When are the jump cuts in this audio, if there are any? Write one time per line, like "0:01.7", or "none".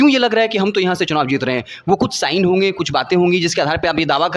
none